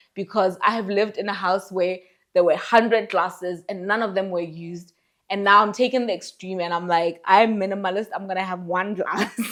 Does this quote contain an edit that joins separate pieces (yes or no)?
no